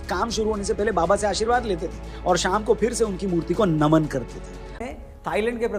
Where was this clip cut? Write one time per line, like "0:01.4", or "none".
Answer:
0:04.8